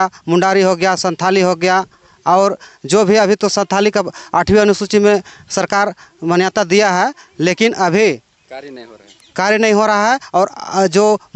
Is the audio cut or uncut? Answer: uncut